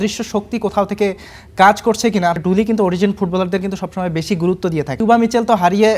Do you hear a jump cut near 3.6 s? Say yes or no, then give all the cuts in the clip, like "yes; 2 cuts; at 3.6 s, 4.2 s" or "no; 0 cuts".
no; 2 cuts; at 2.4 s, 5.0 s